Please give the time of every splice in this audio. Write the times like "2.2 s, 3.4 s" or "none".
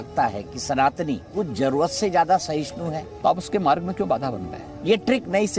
1.3 s, 3.1 s, 4.7 s